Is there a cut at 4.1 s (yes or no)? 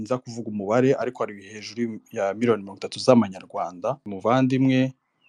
yes